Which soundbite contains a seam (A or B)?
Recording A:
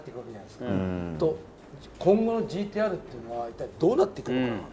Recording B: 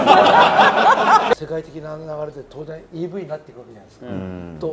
B